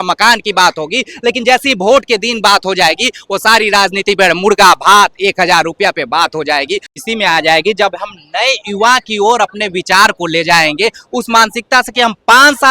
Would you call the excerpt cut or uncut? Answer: cut